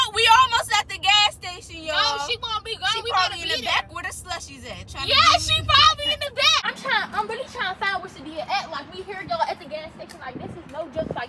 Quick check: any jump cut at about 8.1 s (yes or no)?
no